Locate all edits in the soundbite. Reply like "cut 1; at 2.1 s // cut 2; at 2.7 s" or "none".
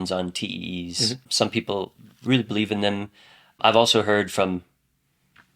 cut 1; at 1.2 s // cut 2; at 3.6 s